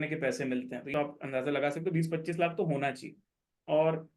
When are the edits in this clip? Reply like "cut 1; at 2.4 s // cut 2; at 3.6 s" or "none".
cut 1; at 0.9 s